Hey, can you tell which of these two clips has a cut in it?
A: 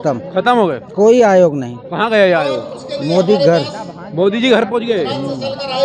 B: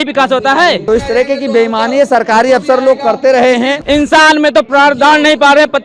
B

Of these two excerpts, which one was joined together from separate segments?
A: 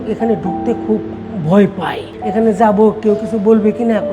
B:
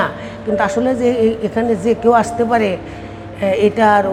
A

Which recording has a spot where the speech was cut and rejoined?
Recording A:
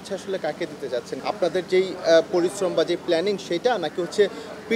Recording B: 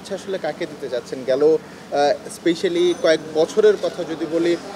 A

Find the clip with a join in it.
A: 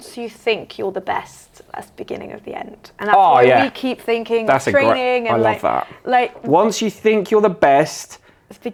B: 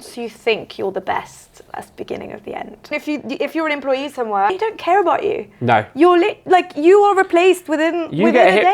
B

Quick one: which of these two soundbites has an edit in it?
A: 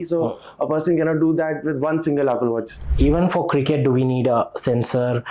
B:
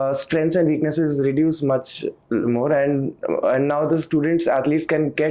A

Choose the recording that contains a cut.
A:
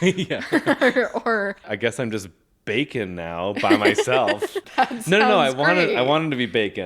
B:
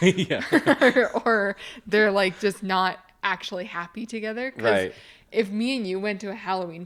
A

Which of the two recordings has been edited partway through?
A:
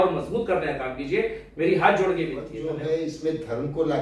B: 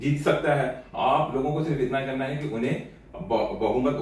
A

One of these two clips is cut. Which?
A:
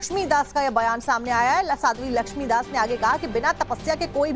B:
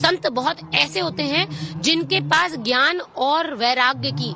B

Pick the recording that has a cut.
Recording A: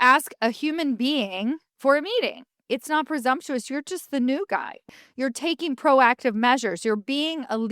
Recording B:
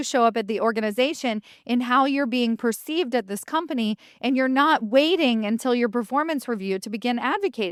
A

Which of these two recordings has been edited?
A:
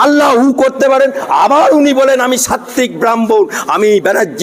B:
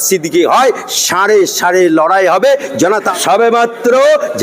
B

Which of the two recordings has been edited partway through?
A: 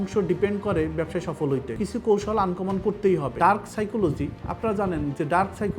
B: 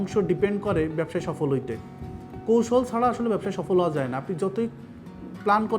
A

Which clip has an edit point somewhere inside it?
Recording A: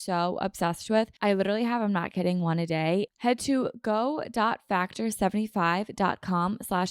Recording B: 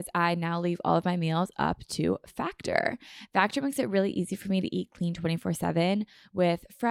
A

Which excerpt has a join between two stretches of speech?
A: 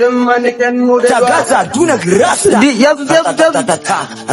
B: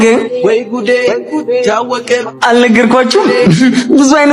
A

